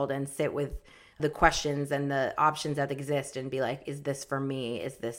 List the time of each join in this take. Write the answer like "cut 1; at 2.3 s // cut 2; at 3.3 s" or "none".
cut 1; at 1.2 s